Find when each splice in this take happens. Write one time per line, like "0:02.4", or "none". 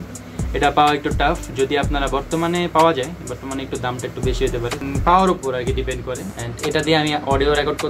0:04.8
0:06.4

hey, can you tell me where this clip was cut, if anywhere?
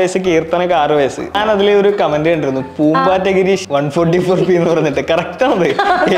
0:01.3
0:03.6

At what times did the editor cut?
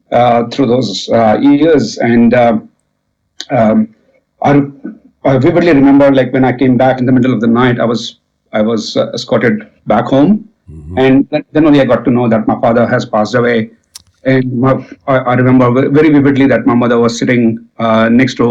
0:07.0

